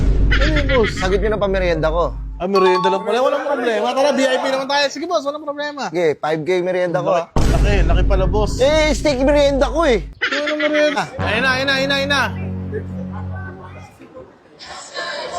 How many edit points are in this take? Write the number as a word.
one